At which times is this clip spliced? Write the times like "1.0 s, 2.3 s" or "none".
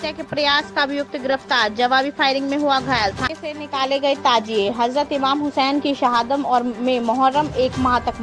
3.2 s